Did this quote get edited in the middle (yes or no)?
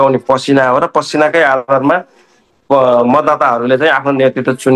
no